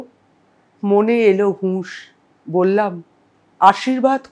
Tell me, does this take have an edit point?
no; 0 cuts

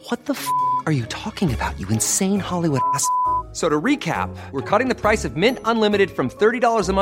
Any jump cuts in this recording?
no; 0 cuts

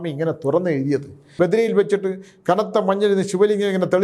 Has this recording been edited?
yes; 1 cut; at 1.3 s

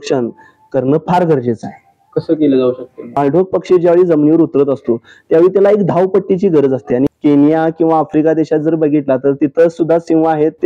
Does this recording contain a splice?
yes; 2 cuts; at 3.2 s, 7.1 s

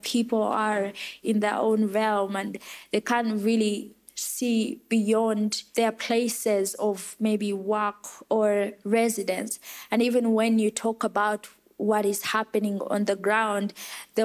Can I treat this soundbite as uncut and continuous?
no; 3 cuts; at 1.1 s, 5.6 s, 8.8 s

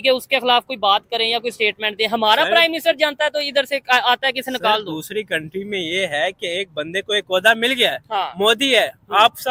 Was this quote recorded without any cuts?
yes; 0 cuts

